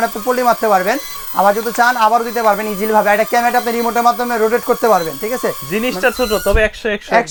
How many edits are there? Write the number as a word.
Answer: zero